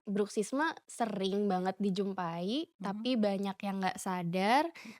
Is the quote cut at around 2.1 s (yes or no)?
no